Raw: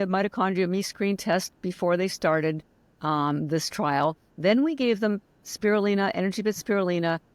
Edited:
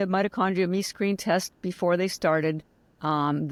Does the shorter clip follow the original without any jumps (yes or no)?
yes